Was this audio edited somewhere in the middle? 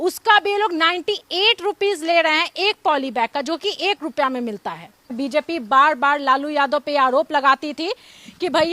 yes; 1 cut; at 5.2 s

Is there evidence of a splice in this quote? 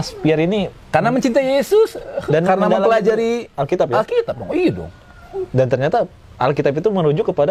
no; 0 cuts

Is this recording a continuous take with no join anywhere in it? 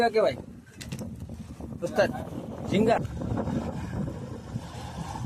no; 1 cut; at 3.0 s

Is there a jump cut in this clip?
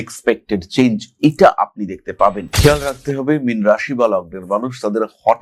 yes; 1 cut; at 2.5 s

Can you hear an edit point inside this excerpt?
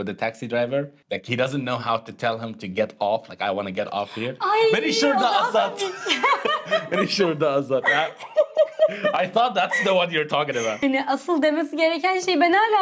yes; 2 cuts; at 1.0 s, 10.8 s

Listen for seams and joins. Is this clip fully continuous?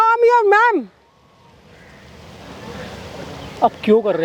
yes; 0 cuts

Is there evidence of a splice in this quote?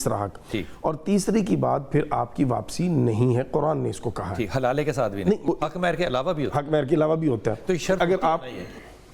yes; 1 cut; at 5.5 s

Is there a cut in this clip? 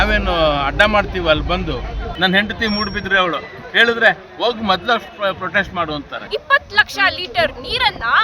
yes; 2 cuts; at 2.0 s, 6.2 s

